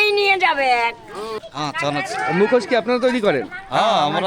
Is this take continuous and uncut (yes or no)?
no